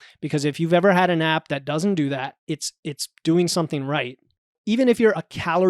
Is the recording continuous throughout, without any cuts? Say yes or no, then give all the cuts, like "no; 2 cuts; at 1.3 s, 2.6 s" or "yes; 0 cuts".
no; 1 cut; at 4.6 s